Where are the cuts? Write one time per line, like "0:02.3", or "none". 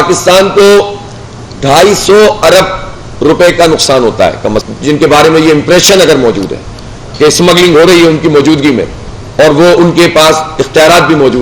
0:04.6